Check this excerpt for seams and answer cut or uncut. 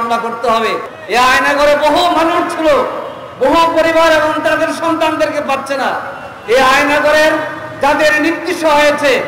cut